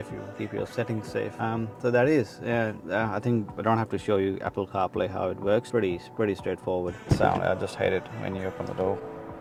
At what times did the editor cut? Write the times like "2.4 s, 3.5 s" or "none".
none